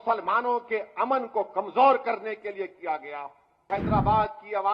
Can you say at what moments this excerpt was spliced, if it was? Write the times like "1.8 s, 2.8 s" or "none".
3.6 s